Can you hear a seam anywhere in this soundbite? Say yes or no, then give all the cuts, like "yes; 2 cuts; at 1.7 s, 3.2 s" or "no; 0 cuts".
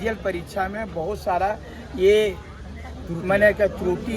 no; 0 cuts